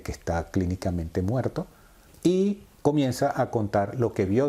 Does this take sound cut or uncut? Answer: cut